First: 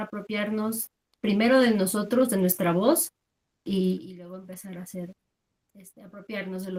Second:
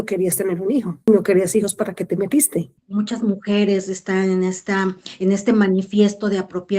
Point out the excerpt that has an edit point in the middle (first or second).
second